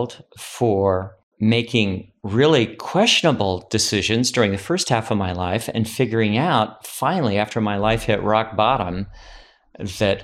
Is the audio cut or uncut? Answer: cut